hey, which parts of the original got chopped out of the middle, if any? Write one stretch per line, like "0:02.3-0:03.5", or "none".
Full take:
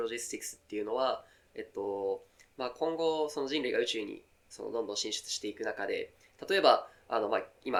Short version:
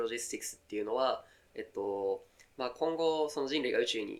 none

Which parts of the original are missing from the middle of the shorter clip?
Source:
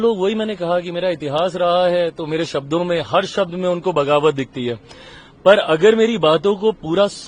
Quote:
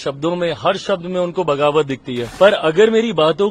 0:04.7-0:05.2

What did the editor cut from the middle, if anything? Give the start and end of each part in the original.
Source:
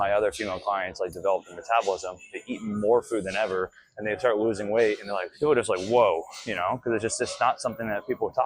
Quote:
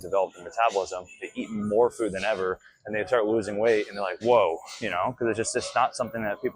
0:05.3-0:05.8

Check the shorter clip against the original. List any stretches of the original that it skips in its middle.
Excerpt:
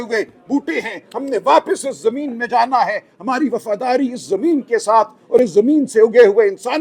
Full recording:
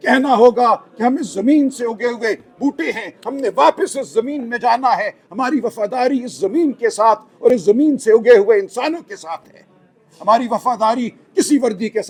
none

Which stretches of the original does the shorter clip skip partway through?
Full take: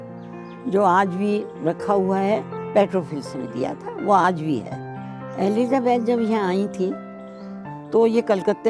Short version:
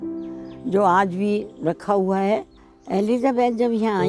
0:02.6-0:05.0

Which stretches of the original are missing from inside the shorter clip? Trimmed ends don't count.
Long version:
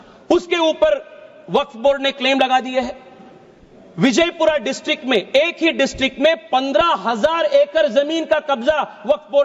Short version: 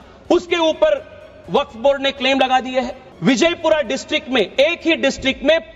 0:03.0-0:03.8

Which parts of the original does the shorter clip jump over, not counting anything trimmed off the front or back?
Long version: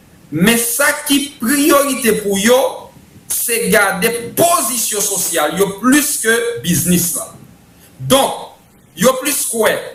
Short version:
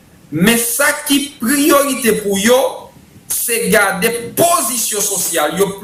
none

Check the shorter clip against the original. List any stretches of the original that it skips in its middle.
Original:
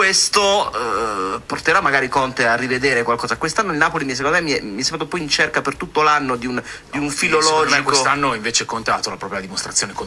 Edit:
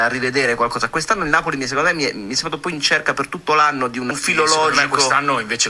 0:06.7-0:07.2

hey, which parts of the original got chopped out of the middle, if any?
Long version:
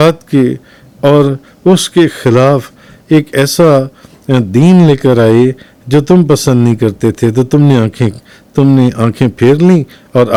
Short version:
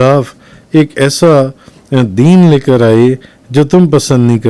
none

